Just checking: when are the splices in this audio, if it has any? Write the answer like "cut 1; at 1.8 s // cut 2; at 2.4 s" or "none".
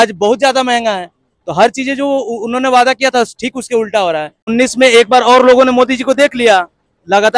cut 1; at 4.4 s